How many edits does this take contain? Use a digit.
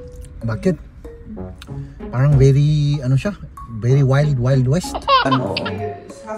1